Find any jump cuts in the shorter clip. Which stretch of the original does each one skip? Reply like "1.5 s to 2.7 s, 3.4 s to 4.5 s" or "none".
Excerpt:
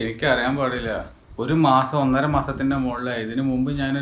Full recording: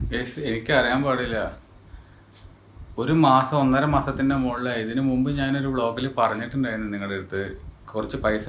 1.6 s to 2.8 s

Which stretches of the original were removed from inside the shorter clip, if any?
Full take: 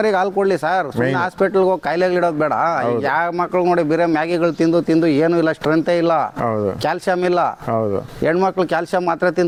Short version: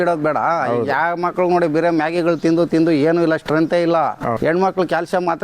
6.5 s to 8.2 s

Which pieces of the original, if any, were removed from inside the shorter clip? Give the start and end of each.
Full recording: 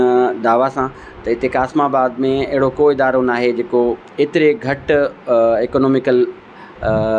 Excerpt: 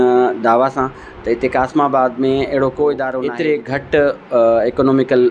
3.2 s to 4.1 s

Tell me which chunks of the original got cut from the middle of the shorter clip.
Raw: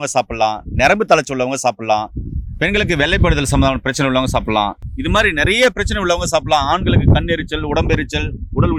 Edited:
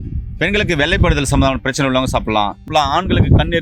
4.9 s to 6.4 s

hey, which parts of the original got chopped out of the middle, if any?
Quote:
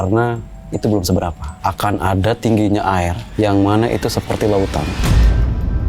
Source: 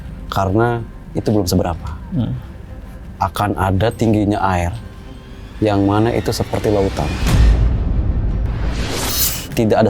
1.9 s to 3.0 s, 4.8 s to 5.4 s

